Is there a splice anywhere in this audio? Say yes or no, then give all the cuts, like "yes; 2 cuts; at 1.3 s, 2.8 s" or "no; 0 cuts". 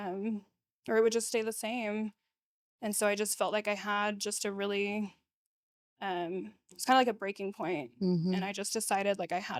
no; 0 cuts